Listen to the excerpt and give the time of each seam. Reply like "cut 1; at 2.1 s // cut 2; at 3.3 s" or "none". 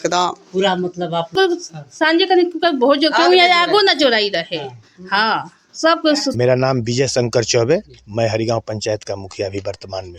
cut 1; at 1.3 s // cut 2; at 6.5 s